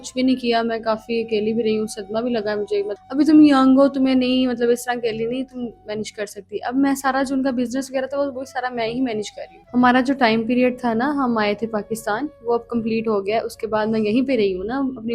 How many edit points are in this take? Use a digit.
2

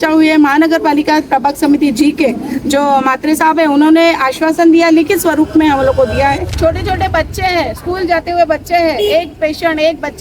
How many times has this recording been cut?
1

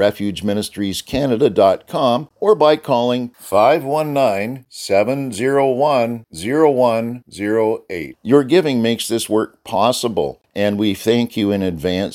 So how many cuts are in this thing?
2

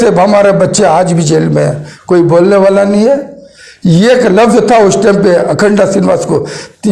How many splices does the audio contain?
1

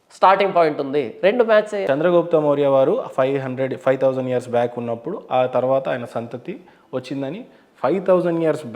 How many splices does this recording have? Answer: 1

